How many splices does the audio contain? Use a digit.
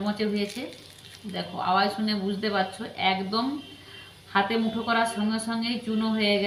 0